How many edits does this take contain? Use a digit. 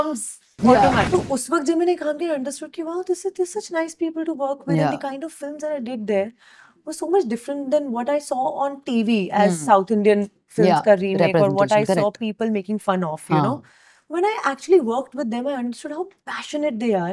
1